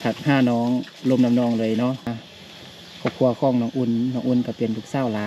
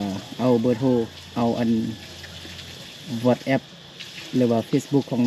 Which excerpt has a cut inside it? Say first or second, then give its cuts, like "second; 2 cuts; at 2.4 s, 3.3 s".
first; 1 cut; at 2.1 s